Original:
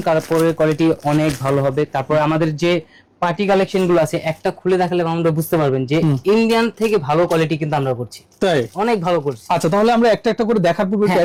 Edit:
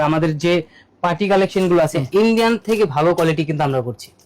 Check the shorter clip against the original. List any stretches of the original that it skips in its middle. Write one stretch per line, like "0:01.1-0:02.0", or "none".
0:04.2-0:06.2

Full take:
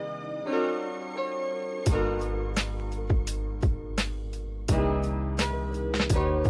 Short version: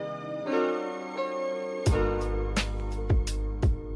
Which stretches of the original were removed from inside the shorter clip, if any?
none

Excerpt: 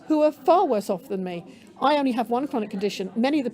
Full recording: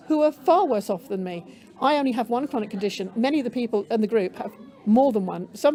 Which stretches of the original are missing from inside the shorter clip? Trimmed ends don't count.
none

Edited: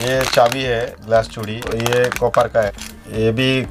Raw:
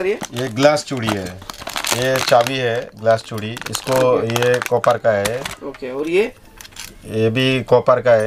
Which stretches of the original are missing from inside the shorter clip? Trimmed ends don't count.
0:03.7-0:04.2
0:05.2-0:06.7

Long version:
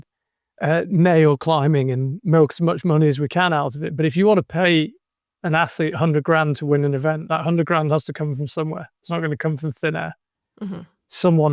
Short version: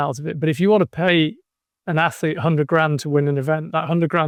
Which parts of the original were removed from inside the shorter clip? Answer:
none

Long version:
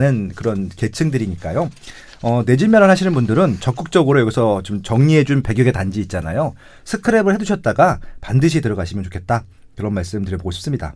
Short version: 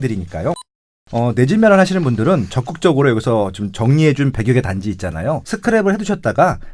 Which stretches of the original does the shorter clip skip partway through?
0:06.6-0:06.9

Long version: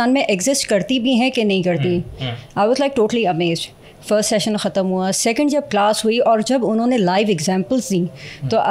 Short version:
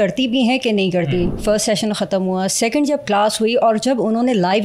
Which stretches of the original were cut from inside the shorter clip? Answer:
0:02.1-0:04.0

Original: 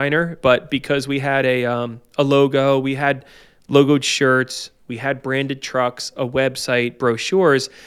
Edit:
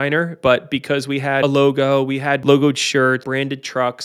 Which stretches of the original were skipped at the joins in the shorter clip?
0:01.4-0:02.2
0:03.2-0:03.7
0:04.5-0:05.2

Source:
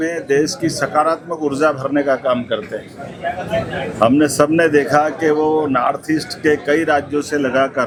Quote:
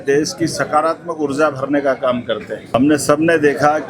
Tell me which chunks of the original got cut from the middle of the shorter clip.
0:03.0-0:04.0

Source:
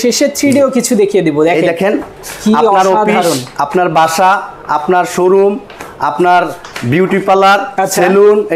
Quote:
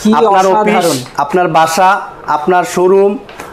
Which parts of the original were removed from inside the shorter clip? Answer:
none

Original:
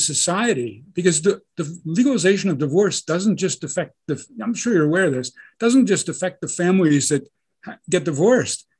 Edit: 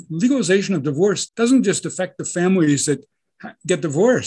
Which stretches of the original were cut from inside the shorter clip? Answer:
0:03.0-0:05.5

